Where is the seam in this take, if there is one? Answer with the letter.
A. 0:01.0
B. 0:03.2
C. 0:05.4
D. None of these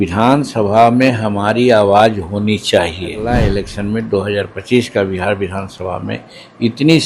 B